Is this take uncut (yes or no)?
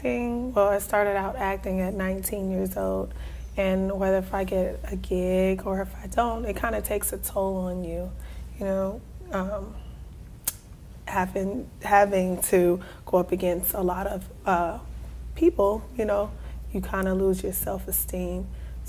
no